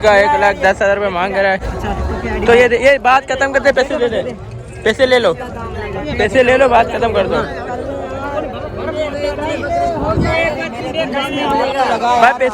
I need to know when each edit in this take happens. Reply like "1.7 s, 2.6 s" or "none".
1.7 s